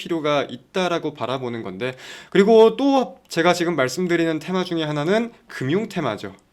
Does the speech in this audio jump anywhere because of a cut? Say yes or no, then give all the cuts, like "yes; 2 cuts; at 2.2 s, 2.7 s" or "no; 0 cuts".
no; 0 cuts